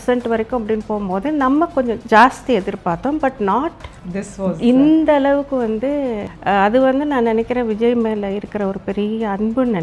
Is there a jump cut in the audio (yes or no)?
yes